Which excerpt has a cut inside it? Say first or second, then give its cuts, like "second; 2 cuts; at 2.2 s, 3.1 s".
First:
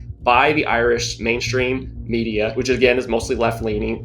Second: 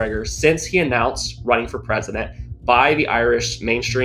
first; 1 cut; at 2.6 s